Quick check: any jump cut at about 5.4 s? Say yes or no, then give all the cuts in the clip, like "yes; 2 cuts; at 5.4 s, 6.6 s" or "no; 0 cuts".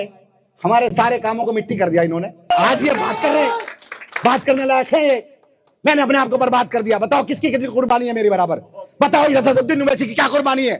no; 1 cut; at 2.5 s